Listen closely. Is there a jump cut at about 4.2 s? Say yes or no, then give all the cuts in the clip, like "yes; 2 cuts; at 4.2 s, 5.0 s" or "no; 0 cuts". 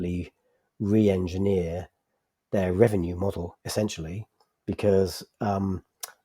no; 0 cuts